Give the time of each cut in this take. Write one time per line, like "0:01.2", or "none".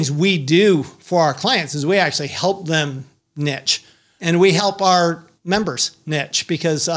0:04.2
0:05.3